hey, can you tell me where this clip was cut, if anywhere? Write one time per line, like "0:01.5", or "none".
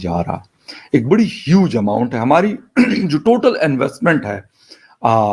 none

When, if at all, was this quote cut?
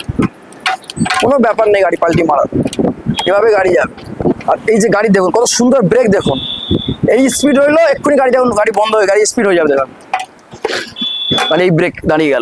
none

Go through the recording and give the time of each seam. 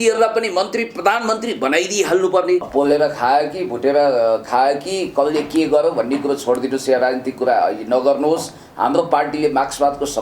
0:02.7

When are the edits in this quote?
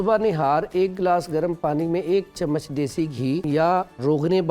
0:03.4

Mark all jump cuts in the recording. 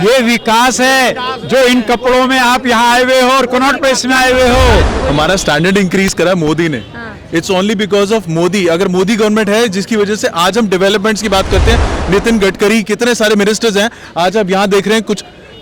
0:04.9

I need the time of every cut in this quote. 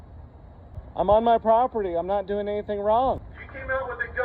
0:00.8
0:03.2

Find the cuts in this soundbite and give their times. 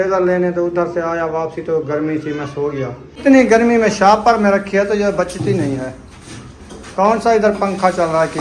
0:03.2

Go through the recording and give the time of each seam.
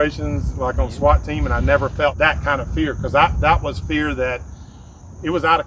0:02.1

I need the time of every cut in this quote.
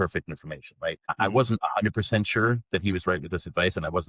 0:01.1

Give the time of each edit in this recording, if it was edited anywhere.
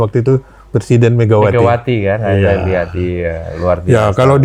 none

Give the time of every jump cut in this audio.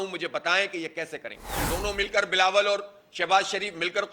0:01.7

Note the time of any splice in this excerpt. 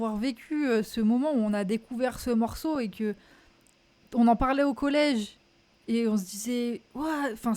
none

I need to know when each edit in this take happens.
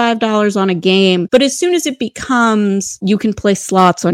0:01.2
0:03.0

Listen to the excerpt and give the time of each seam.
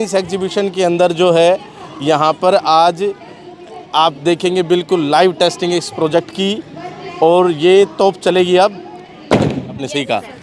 0:09.3

